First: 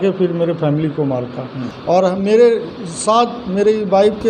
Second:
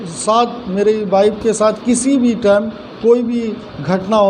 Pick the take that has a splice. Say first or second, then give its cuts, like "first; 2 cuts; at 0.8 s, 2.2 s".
first; 1 cut; at 1.7 s